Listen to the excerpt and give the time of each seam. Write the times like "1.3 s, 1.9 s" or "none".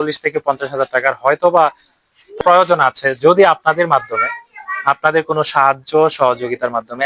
2.4 s